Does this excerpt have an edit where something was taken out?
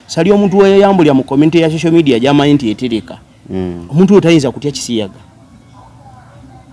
no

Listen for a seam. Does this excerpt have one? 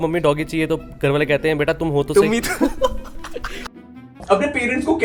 no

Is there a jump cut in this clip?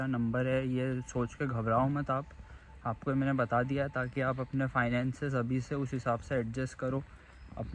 no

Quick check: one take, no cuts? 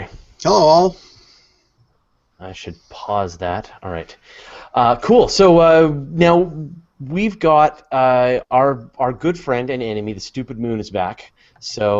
yes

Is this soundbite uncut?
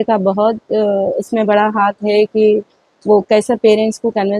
yes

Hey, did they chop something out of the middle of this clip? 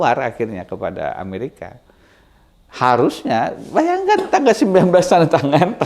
no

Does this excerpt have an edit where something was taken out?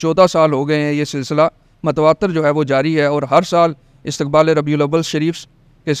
no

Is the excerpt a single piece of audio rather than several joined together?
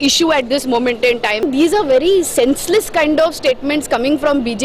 no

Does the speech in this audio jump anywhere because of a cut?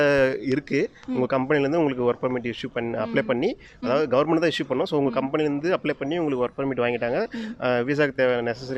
no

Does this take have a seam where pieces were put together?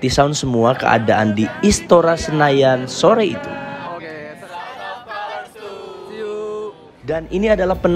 yes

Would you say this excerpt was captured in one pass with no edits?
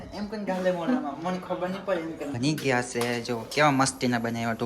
no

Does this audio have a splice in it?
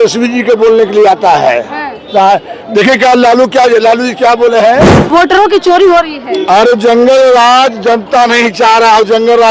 yes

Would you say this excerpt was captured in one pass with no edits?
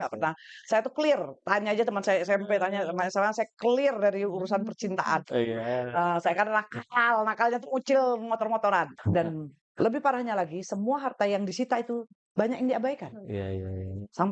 no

